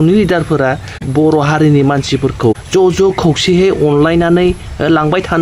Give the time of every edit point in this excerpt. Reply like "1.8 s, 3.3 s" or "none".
1.1 s, 2.6 s